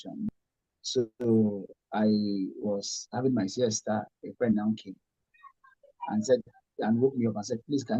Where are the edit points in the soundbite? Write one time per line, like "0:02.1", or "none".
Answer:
0:04.1